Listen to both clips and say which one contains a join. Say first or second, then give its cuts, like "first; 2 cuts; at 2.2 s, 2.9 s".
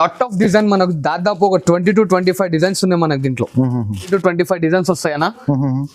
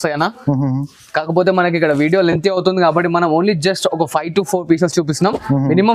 first; 1 cut; at 4.1 s